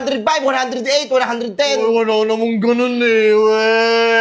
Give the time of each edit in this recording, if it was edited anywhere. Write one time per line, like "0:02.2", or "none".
none